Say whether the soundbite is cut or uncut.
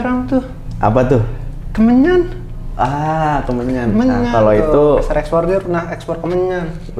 uncut